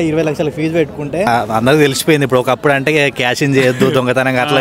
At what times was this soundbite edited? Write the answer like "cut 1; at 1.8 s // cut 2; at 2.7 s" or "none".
cut 1; at 1.3 s